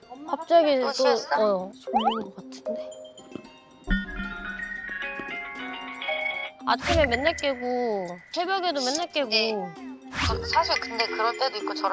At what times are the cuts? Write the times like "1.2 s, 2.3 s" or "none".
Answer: none